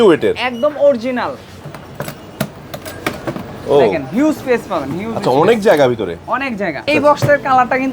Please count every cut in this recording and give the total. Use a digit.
2